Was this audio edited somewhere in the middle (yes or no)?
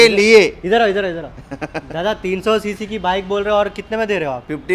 no